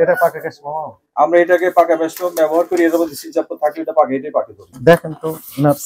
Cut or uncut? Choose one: cut